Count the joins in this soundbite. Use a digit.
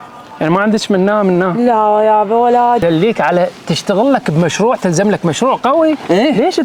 1